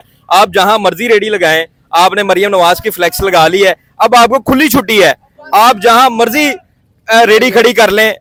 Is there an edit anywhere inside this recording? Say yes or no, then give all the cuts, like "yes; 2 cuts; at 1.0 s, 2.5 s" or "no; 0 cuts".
no; 0 cuts